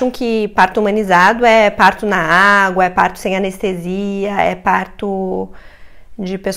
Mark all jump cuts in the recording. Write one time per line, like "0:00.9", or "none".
none